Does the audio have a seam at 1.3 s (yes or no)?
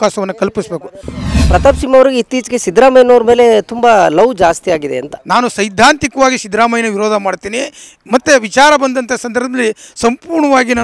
yes